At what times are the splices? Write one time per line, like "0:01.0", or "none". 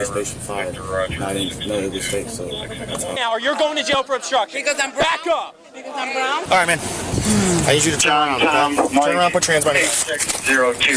0:03.2
0:06.4